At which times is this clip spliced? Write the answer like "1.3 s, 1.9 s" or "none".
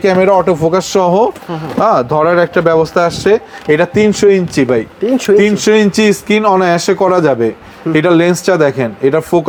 none